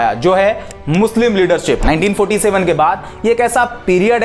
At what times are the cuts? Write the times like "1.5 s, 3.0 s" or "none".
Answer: 1.8 s